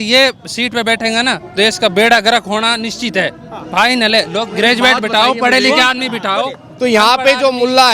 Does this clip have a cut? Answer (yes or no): no